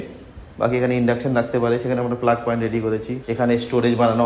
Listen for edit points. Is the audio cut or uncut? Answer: uncut